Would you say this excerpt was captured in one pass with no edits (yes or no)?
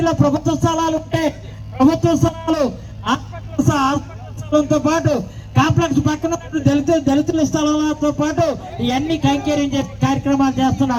yes